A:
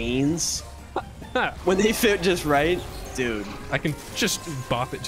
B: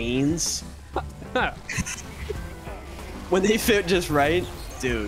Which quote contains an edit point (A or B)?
A